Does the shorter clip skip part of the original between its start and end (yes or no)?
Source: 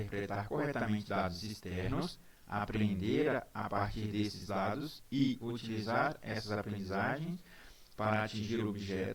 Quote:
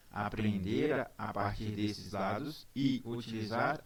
no